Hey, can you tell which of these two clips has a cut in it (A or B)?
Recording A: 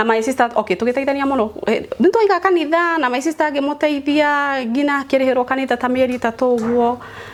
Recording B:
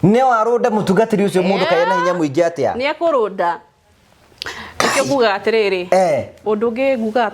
B